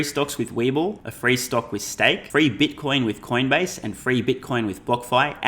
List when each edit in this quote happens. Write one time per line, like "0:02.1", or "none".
0:01.1
0:02.2